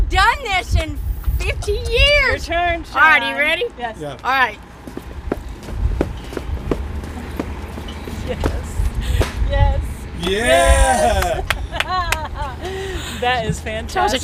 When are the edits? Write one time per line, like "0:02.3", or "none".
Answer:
none